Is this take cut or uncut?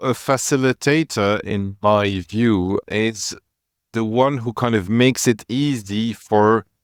uncut